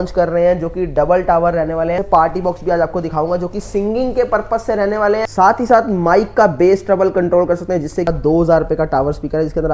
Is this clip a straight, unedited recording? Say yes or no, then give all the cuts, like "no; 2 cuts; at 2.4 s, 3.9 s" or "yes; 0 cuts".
no; 3 cuts; at 2.0 s, 5.3 s, 8.1 s